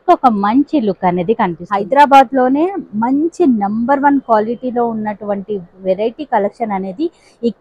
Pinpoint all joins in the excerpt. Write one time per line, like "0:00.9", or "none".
0:01.7

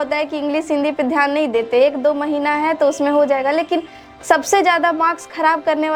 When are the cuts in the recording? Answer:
none

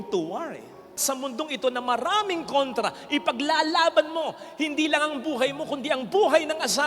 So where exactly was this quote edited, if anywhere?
0:01.0

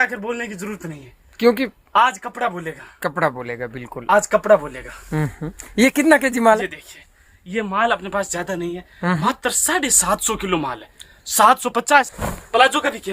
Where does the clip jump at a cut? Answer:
0:12.2

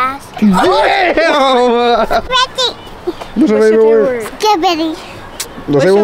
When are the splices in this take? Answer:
none

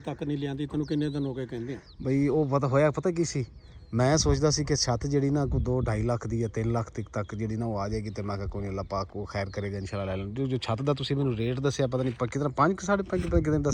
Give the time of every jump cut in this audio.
none

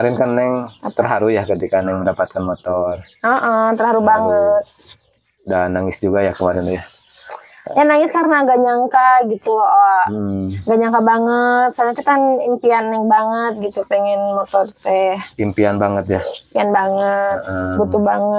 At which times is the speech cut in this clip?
none

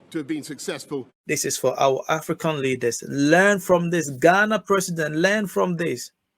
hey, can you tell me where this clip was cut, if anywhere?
0:01.2

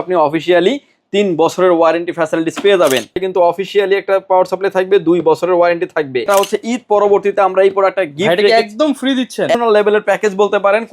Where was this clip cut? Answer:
0:03.2
0:06.3
0:09.5

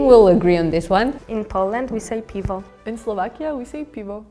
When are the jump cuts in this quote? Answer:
0:01.2

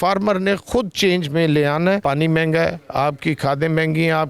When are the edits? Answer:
0:02.0

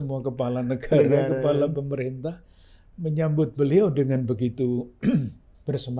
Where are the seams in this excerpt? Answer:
none

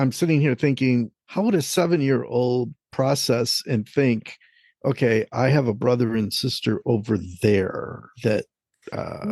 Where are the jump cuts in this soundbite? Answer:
0:01.2

